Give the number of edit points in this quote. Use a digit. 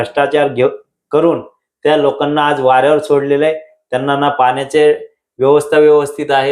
0